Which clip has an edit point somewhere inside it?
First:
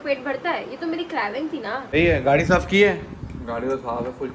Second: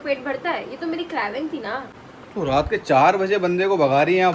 first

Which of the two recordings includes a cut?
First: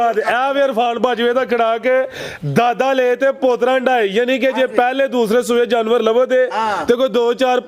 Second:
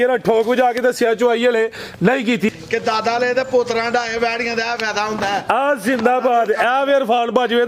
second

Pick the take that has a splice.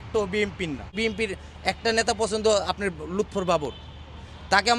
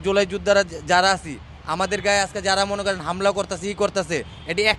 first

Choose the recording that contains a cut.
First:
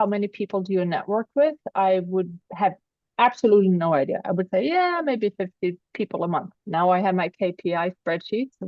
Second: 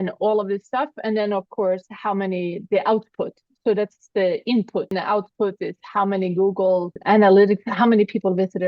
second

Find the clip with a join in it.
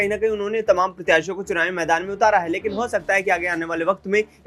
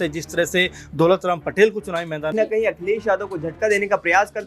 second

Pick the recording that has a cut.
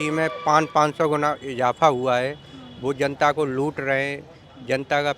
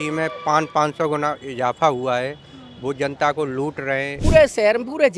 second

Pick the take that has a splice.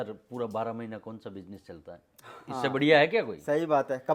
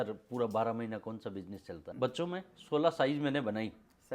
second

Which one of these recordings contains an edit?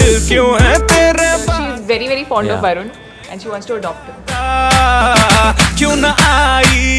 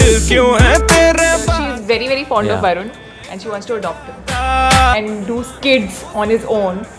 first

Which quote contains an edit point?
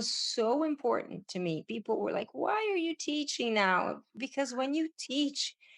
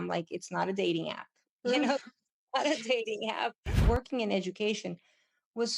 second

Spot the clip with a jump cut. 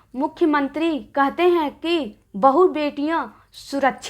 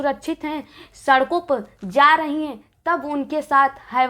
first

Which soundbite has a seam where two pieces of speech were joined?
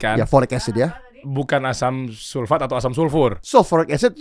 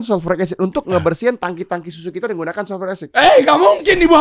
first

